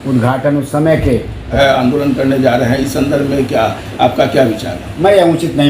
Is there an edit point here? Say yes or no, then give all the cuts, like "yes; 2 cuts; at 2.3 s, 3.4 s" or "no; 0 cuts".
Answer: yes; 1 cut; at 1.6 s